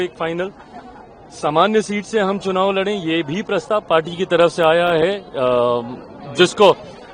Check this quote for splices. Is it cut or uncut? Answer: uncut